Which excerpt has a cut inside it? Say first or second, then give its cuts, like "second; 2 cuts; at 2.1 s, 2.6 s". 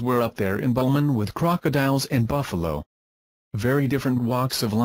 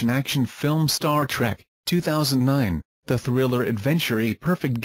second; 1 cut; at 1.6 s